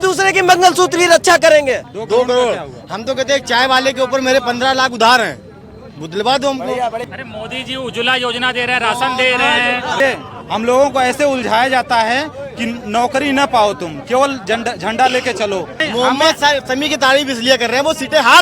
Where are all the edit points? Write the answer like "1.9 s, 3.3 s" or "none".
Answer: 1.9 s, 7.0 s, 10.0 s, 15.8 s